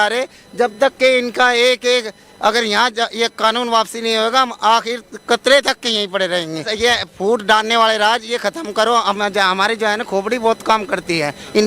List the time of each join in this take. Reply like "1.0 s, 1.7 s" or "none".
6.7 s